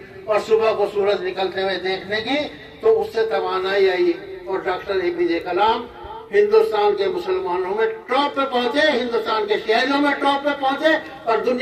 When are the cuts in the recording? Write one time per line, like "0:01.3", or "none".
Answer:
none

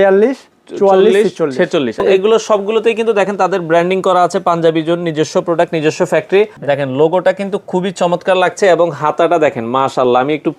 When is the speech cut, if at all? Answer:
0:02.0
0:06.6

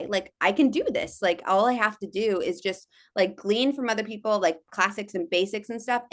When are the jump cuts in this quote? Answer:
none

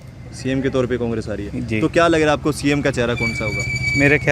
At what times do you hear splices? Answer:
none

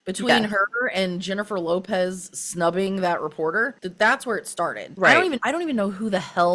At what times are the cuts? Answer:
0:03.8
0:04.8
0:05.4

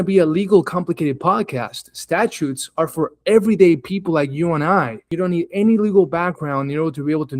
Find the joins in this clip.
0:05.0

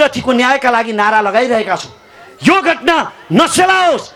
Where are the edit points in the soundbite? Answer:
none

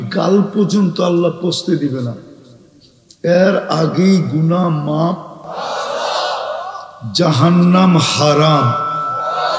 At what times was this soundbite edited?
0:05.4

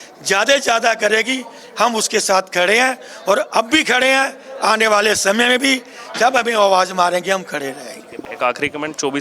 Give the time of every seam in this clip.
0:08.2

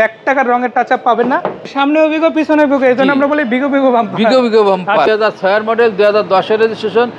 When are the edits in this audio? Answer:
0:01.7
0:05.1

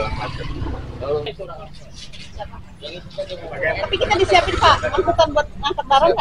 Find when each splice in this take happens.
0:01.3

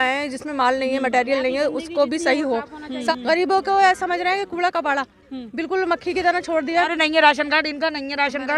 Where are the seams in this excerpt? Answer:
0:03.1
0:06.9

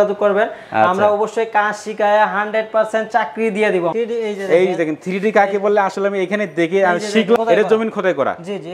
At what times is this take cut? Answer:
0:03.9
0:07.4

